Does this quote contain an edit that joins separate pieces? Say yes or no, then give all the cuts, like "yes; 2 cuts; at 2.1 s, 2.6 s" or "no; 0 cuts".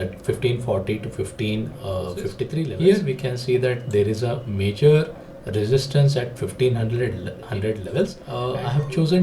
yes; 2 cuts; at 2.7 s, 8.2 s